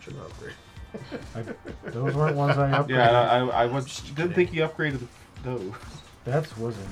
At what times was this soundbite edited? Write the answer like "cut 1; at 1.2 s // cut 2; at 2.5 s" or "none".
none